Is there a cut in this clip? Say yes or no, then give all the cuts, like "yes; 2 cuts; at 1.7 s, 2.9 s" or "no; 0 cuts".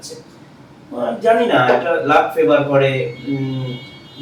no; 0 cuts